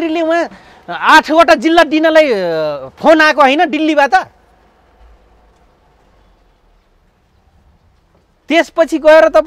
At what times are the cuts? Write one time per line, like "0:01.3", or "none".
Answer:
none

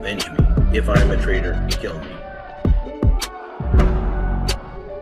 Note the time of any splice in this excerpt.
0:02.3

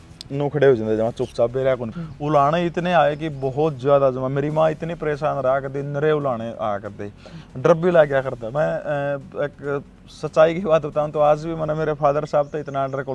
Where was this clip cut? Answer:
0:02.0

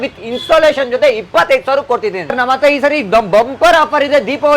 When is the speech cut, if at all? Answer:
0:02.3

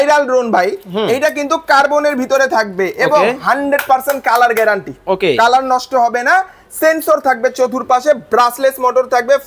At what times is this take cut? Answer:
none

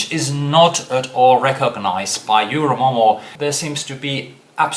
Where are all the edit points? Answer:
0:03.3

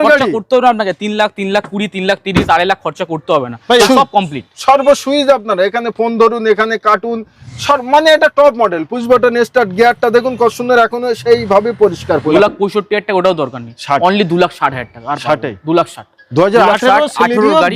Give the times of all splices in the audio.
0:03.8
0:12.3

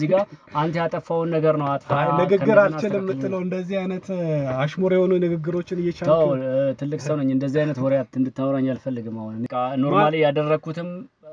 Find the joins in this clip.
0:09.5

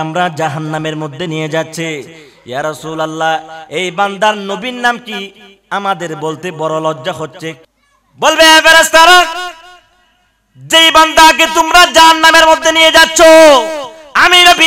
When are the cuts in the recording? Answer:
0:07.7

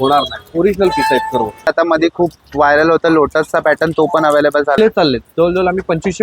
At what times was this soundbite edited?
0:01.7
0:04.8

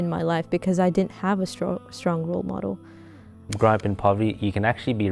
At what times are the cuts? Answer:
0:03.5

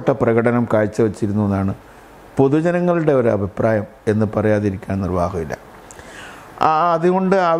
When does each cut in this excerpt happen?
none

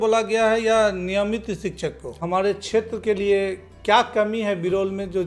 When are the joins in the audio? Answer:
0:02.2

